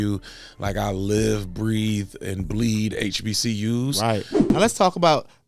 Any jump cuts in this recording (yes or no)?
yes